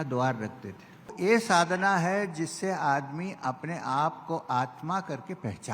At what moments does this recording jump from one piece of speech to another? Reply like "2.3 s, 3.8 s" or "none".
1.1 s